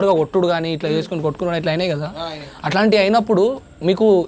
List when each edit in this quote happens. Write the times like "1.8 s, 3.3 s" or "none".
none

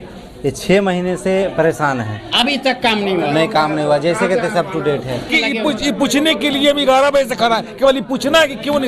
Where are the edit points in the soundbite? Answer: 5.3 s

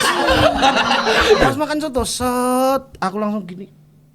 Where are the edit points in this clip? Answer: 1.4 s

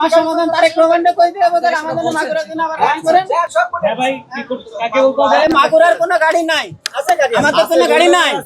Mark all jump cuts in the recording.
none

